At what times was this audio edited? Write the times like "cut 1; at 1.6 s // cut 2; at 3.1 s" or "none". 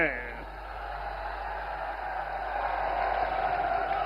none